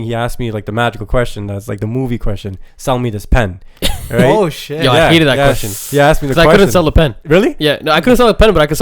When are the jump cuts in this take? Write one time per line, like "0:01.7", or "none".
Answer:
0:07.2